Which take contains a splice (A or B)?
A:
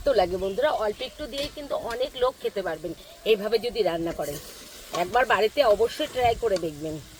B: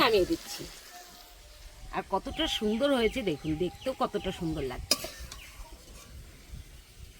B